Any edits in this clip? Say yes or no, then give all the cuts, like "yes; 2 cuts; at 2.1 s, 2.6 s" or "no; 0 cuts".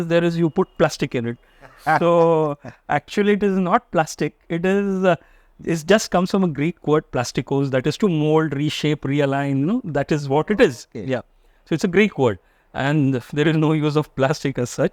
no; 0 cuts